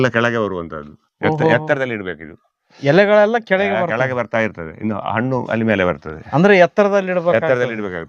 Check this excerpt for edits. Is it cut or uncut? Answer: uncut